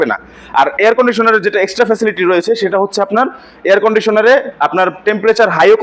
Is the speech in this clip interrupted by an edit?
no; 0 cuts

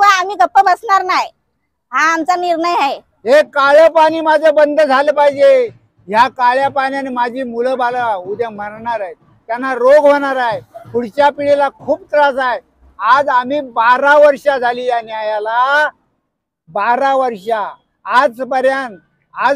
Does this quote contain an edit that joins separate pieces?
yes; 1 cut; at 3.1 s

